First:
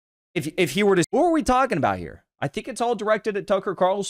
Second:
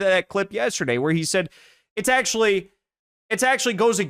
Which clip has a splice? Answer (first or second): first